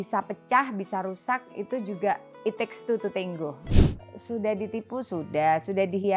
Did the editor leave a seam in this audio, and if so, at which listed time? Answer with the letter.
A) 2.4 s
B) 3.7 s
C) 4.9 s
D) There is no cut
B